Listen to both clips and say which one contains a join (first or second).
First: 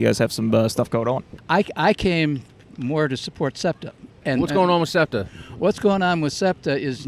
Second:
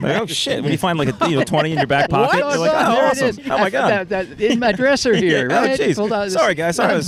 first